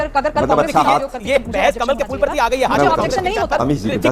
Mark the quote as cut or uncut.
uncut